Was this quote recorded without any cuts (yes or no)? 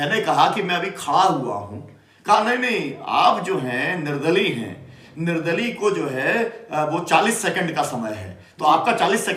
yes